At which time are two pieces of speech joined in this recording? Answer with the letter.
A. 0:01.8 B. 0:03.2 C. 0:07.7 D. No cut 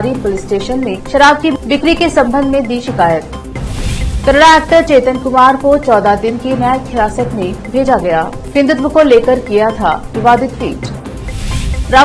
D